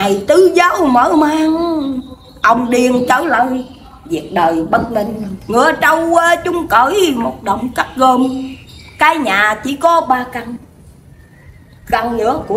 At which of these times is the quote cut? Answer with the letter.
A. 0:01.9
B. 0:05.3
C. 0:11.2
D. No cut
B